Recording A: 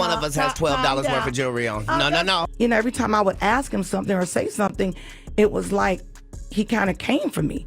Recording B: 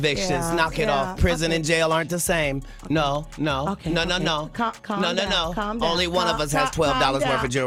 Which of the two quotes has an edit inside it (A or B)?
A